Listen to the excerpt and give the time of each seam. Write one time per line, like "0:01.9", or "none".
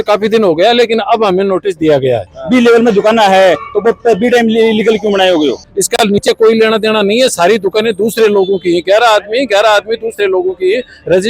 0:02.3
0:05.7